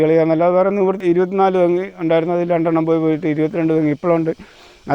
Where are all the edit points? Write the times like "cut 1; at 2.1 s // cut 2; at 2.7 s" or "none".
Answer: cut 1; at 1.0 s